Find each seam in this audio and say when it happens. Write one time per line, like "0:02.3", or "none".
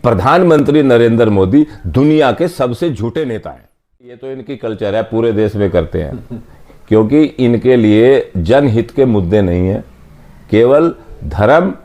0:04.0